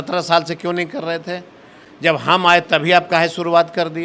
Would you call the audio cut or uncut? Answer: uncut